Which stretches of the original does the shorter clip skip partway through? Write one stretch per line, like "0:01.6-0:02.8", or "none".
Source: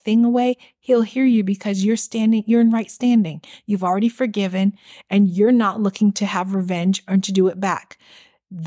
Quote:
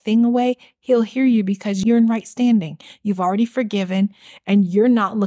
0:01.8-0:02.4